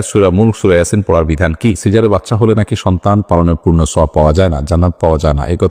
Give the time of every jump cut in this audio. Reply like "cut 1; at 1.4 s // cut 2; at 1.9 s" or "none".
cut 1; at 1.8 s